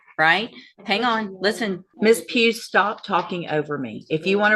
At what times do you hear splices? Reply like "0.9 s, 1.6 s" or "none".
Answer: 1.9 s